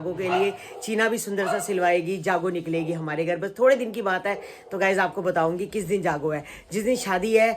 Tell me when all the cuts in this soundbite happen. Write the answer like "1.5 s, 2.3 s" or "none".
none